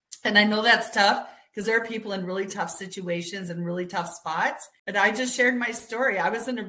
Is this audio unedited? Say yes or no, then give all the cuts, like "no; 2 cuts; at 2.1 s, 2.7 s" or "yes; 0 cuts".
no; 1 cut; at 4.7 s